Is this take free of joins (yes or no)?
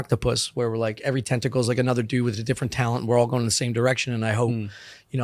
yes